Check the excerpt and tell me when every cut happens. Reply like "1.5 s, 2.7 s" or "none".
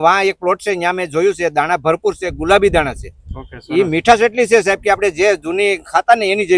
none

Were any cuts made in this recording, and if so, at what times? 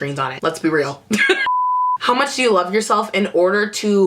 1.7 s

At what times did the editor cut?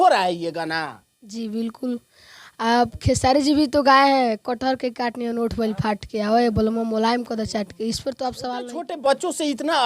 8.5 s

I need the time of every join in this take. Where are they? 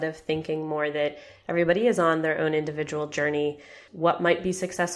3.8 s

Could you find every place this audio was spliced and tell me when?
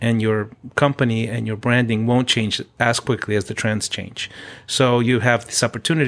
none

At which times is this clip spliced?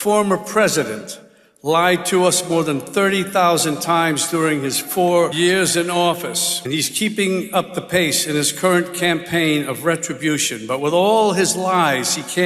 5.3 s, 6.5 s

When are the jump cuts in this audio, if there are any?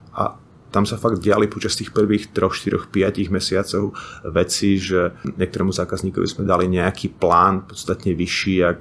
5.3 s

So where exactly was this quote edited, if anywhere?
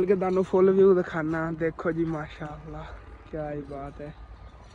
none

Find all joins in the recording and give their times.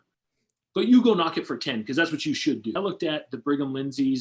2.7 s

